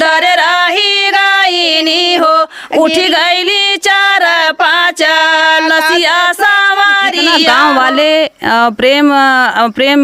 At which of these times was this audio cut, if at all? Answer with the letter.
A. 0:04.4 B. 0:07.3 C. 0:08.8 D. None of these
B